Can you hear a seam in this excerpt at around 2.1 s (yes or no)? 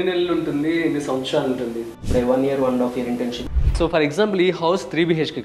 yes